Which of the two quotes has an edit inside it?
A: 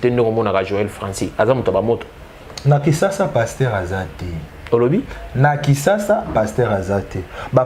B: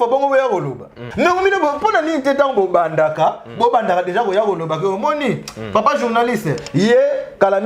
B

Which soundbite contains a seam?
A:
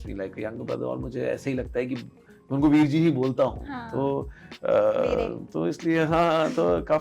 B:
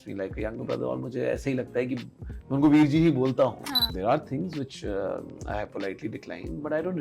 B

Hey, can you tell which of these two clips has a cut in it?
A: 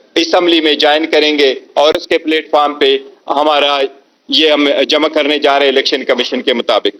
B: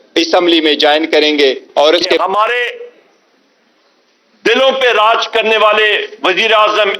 B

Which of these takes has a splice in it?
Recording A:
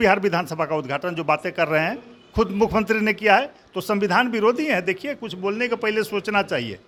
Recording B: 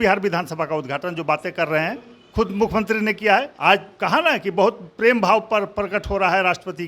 B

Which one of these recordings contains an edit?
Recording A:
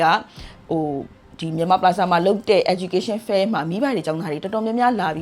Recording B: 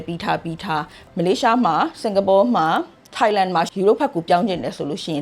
B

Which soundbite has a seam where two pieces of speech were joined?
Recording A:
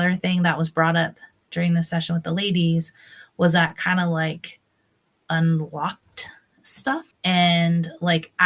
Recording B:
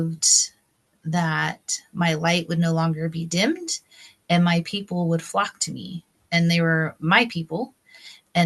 A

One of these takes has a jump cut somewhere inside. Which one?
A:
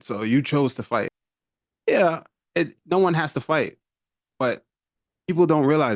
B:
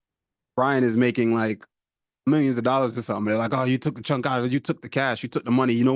A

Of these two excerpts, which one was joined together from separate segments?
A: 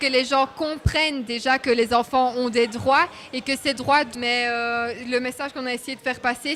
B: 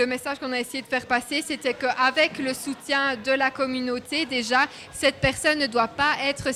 A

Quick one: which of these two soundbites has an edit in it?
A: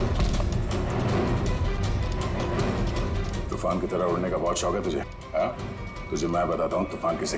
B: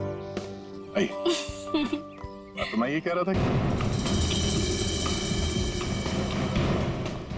B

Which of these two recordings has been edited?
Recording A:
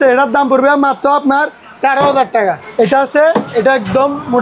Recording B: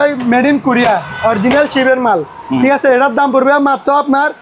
A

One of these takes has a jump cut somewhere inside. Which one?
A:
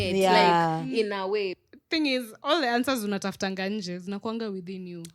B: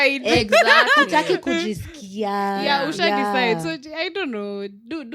A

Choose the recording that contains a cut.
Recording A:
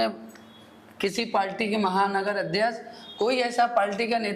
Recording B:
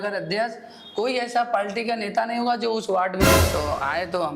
B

